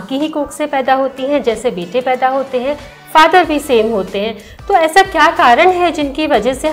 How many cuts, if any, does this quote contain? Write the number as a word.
zero